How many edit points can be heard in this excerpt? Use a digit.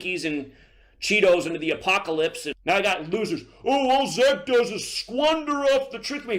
1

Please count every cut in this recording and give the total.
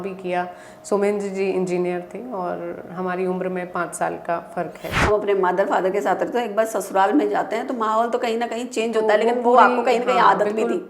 1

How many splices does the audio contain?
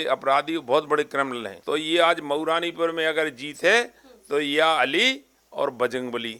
1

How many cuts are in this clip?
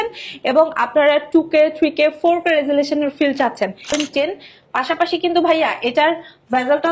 1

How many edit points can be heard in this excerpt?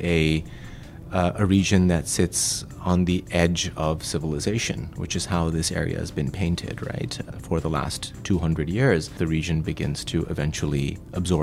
2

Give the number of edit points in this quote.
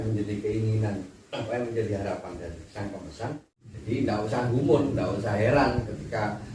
1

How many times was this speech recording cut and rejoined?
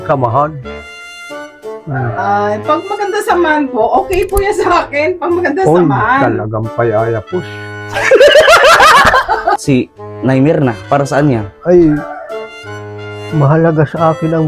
1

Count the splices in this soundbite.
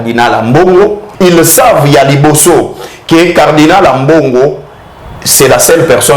1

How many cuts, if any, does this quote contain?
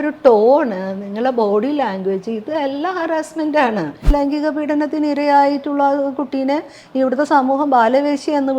1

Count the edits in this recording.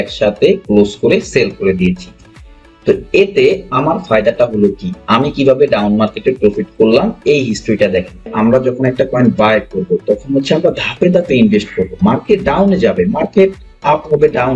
1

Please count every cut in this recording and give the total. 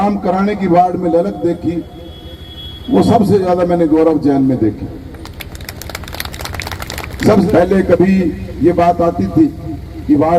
1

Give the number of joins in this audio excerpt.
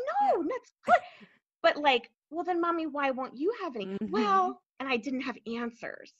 1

